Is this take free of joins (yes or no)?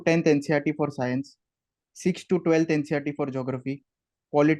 yes